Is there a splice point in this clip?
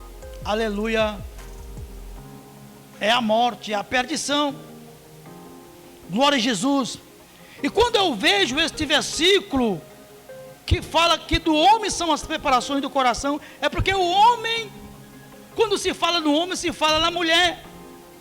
yes; 2 cuts; at 1.2 s, 3.0 s

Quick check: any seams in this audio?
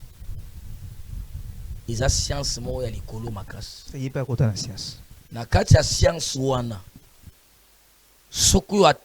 no; 0 cuts

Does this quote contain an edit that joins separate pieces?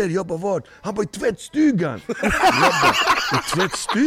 no; 0 cuts

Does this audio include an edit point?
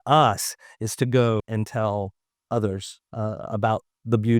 yes; 1 cut; at 1.4 s

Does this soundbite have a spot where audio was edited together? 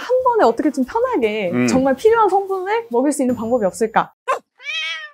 yes; 1 cut; at 4.1 s

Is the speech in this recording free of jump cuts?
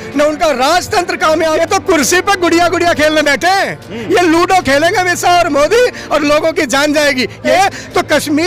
no; 2 cuts; at 1.6 s, 7.4 s

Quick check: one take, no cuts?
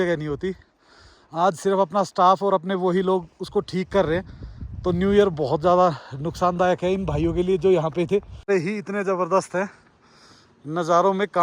no; 1 cut; at 8.5 s

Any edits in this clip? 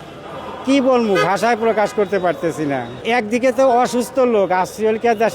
yes; 1 cut; at 3.0 s

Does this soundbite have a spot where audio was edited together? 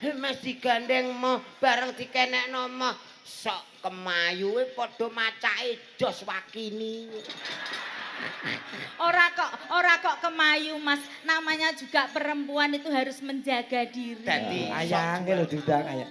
yes; 1 cut; at 14.7 s

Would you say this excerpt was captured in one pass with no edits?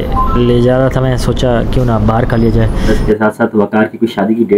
no; 1 cut; at 2.8 s

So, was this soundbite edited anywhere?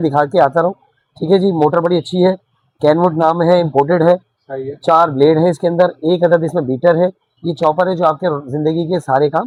no; 0 cuts

